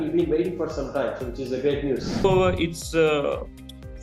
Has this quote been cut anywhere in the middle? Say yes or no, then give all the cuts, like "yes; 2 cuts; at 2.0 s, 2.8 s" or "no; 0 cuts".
yes; 1 cut; at 2.2 s